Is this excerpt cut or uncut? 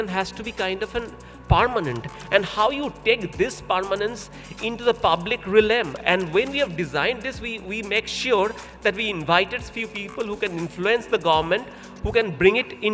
uncut